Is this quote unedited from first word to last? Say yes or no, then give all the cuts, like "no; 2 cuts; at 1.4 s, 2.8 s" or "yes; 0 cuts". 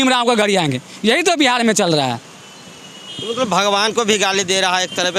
yes; 0 cuts